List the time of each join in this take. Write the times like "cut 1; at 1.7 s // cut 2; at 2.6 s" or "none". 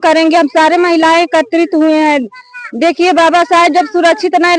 none